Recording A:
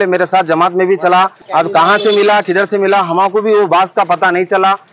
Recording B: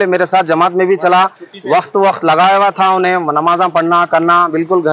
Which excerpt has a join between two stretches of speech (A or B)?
A